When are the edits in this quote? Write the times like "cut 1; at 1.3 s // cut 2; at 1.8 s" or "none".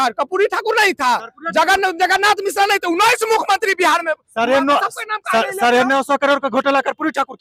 none

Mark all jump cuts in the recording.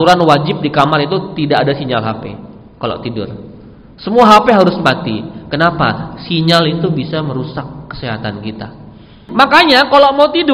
cut 1; at 9.2 s

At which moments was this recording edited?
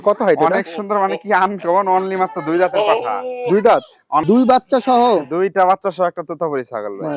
cut 1; at 4.2 s

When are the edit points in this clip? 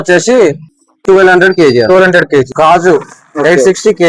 cut 1; at 2.5 s

